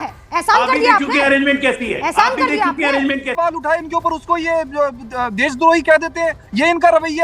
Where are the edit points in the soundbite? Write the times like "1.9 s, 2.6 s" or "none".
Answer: 3.4 s